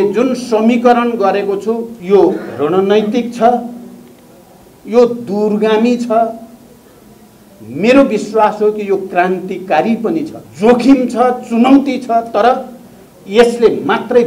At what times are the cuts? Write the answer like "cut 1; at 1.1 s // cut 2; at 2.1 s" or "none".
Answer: cut 1; at 1.9 s // cut 2; at 10.4 s